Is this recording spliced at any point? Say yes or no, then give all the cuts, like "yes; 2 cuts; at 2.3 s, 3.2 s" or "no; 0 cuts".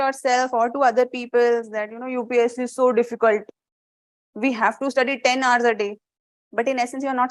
no; 0 cuts